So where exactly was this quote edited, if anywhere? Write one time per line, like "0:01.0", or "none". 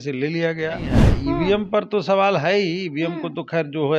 0:01.0